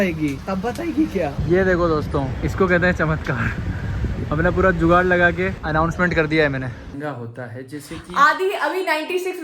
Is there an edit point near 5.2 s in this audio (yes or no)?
no